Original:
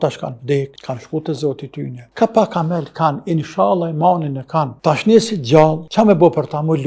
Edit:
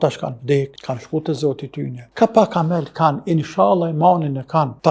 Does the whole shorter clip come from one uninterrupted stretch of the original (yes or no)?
yes